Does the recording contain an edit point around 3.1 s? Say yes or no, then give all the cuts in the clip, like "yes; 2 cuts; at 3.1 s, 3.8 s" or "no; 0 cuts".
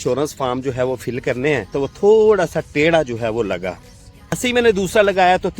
no; 2 cuts; at 1.7 s, 4.4 s